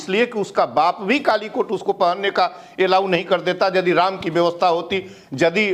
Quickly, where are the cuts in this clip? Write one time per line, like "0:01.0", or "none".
none